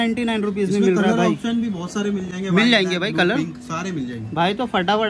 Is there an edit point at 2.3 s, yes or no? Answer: no